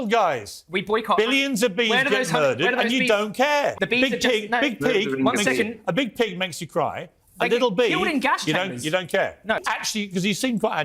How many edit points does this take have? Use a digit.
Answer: 2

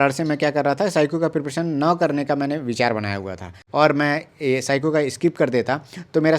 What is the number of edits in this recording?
1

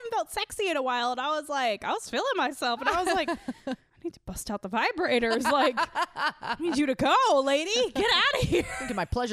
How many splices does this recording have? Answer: 0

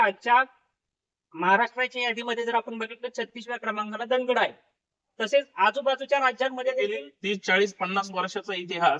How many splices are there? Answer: 1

